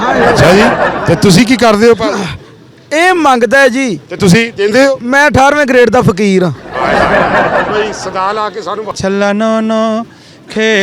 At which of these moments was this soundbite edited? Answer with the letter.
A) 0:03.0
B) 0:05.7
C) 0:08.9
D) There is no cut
C